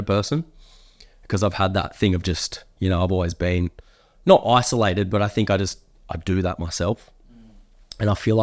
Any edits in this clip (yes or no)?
no